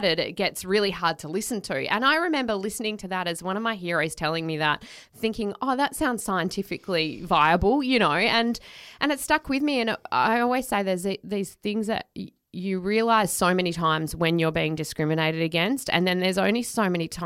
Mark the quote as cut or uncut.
uncut